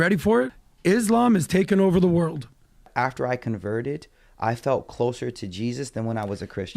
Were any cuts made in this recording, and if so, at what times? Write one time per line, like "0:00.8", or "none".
0:02.8